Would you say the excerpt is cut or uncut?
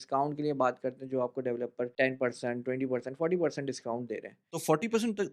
cut